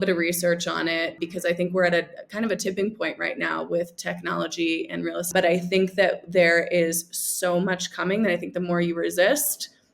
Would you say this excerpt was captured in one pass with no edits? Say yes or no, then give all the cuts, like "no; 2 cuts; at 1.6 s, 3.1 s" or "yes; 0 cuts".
no; 2 cuts; at 1.2 s, 5.3 s